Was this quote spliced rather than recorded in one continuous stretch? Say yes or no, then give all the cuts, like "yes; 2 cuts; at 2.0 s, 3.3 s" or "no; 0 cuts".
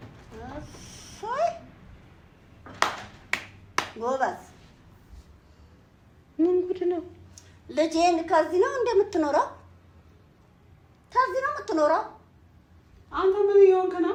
no; 0 cuts